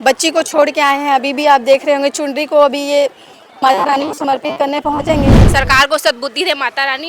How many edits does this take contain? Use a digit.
1